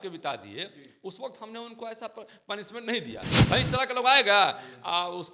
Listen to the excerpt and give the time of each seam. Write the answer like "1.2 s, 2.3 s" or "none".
3.3 s